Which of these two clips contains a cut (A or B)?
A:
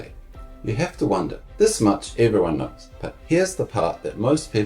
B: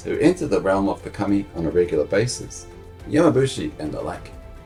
A